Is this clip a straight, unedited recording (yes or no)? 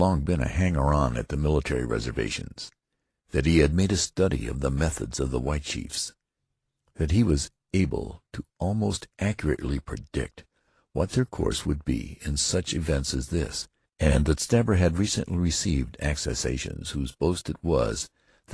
yes